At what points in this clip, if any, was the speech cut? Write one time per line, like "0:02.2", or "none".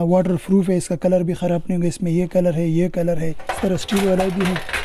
0:03.4